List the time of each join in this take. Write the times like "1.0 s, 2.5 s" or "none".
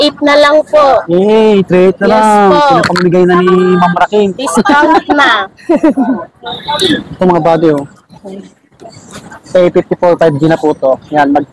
6.6 s